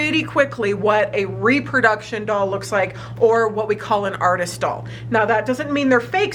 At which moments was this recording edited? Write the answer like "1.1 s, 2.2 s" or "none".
none